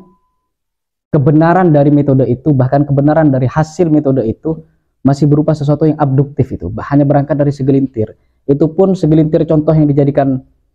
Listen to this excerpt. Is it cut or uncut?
uncut